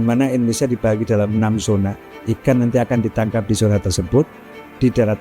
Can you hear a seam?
yes; 1 cut; at 2.1 s

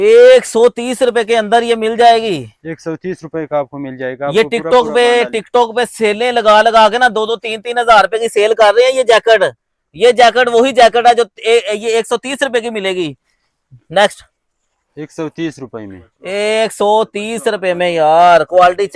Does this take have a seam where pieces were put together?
no; 0 cuts

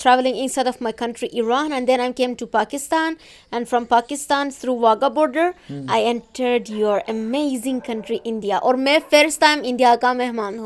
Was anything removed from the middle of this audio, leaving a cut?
no; 0 cuts

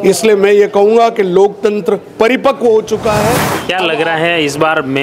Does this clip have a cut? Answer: yes; 1 cut; at 3.5 s

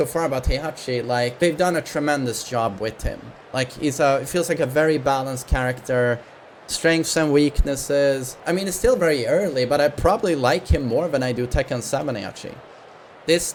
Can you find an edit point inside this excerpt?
no; 0 cuts

